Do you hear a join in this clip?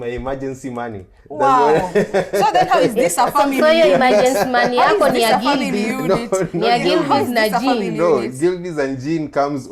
no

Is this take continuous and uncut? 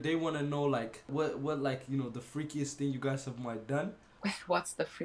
no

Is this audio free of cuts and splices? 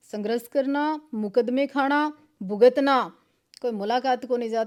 yes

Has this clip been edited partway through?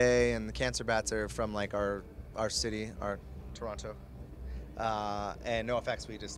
yes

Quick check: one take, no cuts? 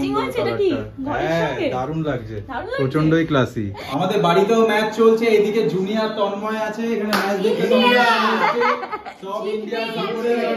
no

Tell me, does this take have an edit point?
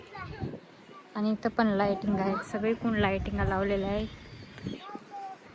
no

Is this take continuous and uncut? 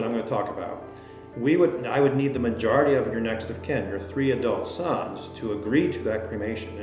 yes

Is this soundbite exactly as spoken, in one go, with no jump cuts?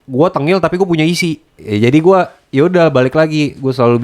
no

